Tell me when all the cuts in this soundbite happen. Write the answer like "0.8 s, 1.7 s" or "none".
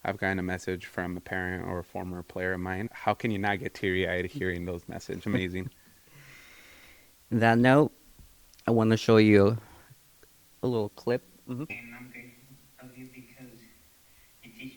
2.9 s, 5.2 s, 11.7 s